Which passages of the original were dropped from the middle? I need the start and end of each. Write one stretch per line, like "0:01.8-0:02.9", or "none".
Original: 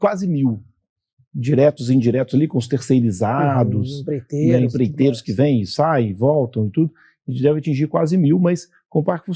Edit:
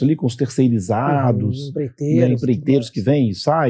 none